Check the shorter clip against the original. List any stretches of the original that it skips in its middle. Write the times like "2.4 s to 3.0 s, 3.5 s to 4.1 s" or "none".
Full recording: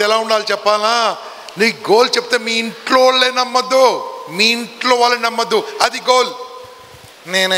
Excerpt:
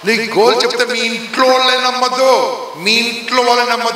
none